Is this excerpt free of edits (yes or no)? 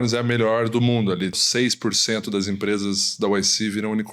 no